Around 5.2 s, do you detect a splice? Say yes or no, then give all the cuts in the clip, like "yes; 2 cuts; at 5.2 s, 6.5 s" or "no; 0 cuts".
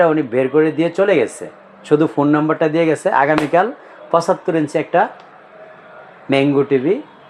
no; 0 cuts